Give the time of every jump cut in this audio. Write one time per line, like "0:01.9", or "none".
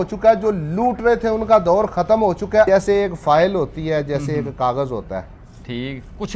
0:02.7